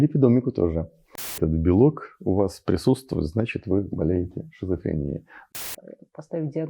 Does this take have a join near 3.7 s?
no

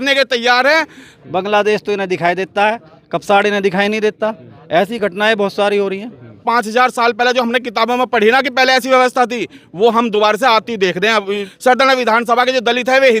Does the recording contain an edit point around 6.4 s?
yes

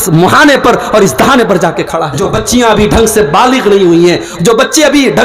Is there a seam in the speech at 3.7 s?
no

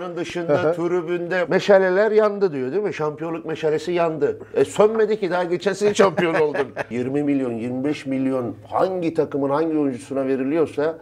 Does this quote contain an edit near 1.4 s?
yes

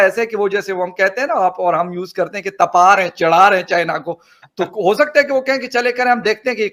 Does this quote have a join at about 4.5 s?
no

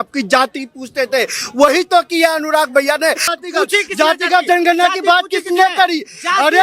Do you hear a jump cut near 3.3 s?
yes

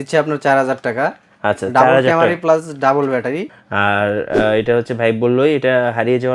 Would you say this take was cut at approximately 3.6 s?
yes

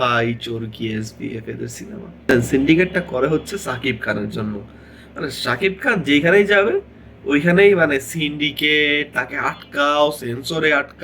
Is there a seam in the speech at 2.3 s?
yes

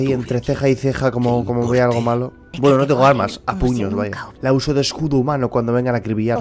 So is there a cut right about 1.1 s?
no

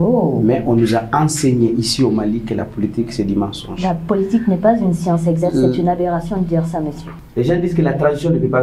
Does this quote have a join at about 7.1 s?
yes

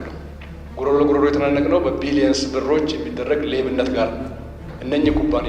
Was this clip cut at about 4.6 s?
yes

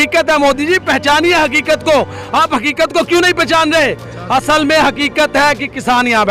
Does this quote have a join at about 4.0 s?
no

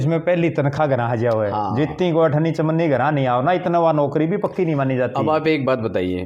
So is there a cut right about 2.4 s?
no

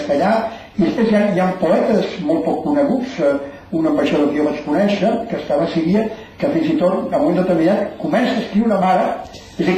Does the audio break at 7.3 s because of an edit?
no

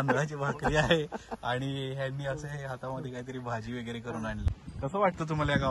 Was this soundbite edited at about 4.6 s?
yes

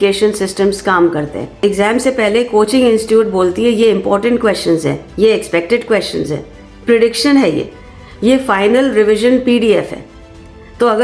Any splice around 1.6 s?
yes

